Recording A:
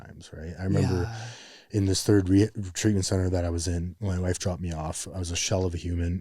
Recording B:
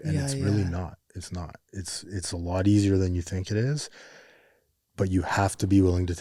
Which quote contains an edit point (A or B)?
A